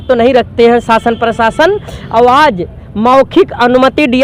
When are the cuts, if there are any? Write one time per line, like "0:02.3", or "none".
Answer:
none